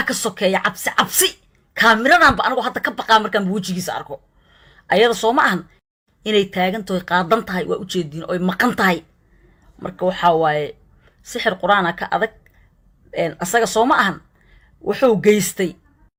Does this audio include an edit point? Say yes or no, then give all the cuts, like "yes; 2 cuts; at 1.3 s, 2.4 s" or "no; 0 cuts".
no; 0 cuts